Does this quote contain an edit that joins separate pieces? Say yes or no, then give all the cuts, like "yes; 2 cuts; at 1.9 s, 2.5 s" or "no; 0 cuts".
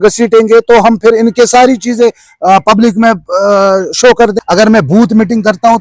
yes; 1 cut; at 4.3 s